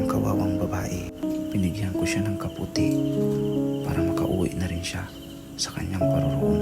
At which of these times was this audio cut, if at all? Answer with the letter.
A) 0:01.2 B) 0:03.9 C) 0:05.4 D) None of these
A